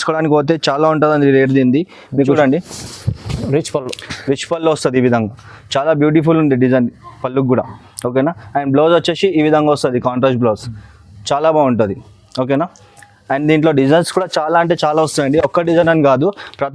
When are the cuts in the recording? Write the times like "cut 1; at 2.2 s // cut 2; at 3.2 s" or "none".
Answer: cut 1; at 2.3 s